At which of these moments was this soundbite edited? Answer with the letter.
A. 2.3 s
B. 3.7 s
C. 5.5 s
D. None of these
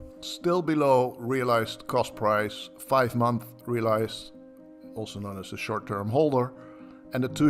D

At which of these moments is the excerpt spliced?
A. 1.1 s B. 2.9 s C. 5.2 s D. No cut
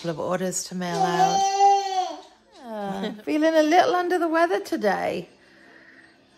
B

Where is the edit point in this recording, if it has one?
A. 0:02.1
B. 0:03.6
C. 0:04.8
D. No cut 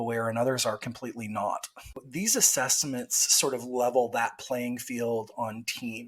A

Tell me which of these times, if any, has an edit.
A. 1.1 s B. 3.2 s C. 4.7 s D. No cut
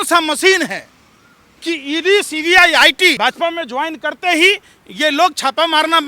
B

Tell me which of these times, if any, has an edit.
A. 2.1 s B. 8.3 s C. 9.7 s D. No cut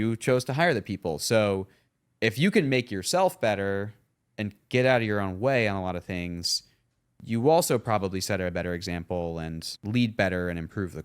C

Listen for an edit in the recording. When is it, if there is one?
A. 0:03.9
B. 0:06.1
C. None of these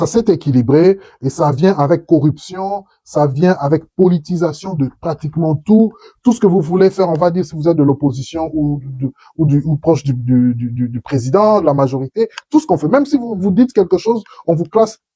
C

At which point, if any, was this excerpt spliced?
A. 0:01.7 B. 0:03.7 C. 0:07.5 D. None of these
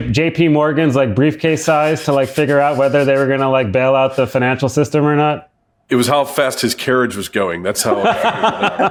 D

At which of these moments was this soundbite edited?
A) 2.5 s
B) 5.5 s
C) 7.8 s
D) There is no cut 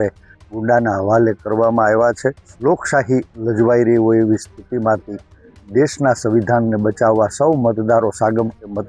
A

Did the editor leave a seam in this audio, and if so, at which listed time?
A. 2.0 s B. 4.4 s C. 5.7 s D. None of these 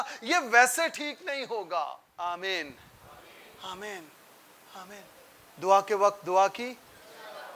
A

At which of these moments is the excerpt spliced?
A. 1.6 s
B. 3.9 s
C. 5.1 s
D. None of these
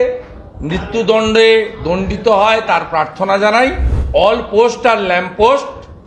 B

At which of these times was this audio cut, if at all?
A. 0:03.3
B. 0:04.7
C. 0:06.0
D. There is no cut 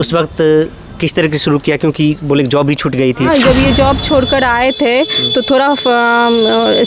A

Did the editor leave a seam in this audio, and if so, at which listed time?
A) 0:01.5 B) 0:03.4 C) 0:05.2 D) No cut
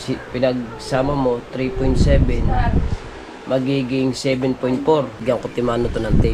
C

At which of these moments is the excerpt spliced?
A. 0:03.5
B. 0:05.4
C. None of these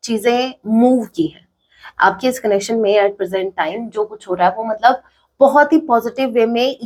C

